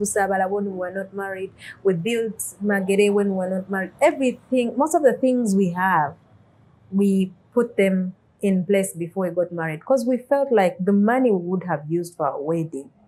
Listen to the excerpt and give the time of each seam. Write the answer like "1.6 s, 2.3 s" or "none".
none